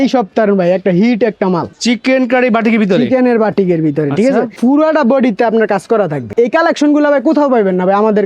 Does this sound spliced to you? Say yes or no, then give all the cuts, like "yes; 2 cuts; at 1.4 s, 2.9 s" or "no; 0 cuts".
yes; 3 cuts; at 1.7 s, 4.6 s, 6.3 s